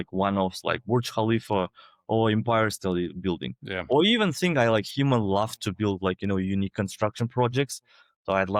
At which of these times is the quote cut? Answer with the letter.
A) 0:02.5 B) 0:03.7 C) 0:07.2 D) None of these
D